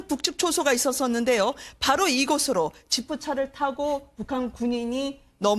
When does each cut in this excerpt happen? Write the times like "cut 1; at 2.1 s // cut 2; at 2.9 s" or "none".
cut 1; at 3.0 s